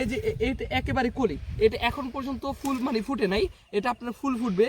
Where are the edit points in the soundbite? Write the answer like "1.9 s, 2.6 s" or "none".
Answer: none